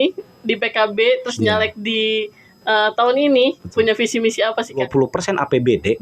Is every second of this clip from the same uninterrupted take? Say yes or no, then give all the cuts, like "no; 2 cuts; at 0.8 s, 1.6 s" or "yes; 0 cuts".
no; 1 cut; at 4.9 s